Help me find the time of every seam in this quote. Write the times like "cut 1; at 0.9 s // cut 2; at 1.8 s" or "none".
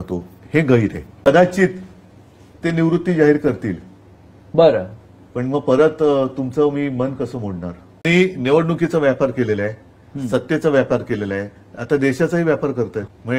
cut 1; at 1.2 s // cut 2; at 8.1 s